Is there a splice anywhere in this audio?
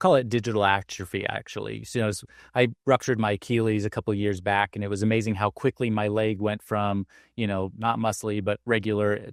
no; 0 cuts

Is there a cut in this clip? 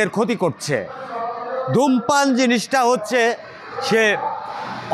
no; 0 cuts

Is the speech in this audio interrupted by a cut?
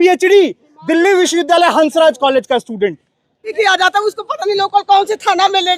yes; 1 cut; at 3.5 s

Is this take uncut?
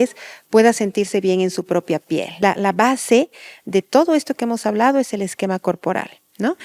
no; 1 cut; at 2.3 s

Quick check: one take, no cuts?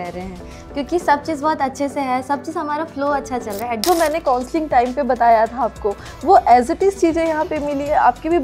no; 1 cut; at 3.8 s

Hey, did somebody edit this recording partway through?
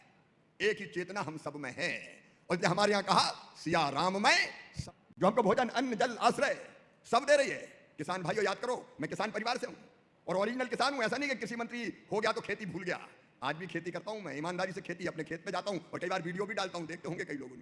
yes; 1 cut; at 4.8 s

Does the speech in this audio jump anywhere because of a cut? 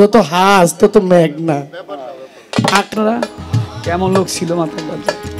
yes; 1 cut; at 2.9 s

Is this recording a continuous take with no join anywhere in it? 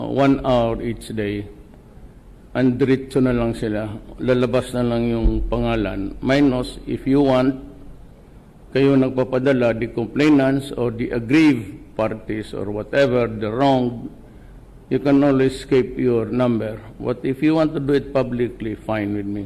no; 1 cut; at 7.0 s

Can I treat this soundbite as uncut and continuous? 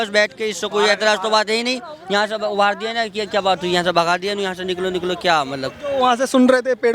yes; 0 cuts

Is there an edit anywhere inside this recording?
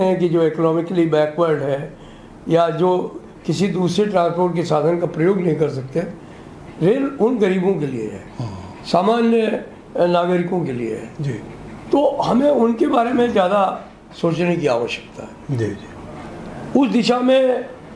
no; 0 cuts

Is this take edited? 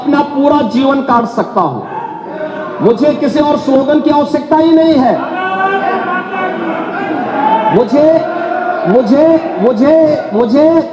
no; 0 cuts

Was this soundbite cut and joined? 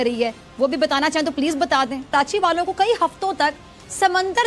yes; 1 cut; at 2.1 s

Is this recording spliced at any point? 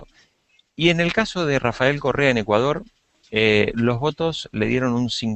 yes; 1 cut; at 2.0 s

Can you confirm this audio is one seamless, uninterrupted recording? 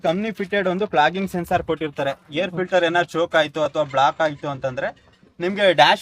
yes; 0 cuts

